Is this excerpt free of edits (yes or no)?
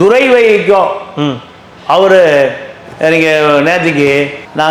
yes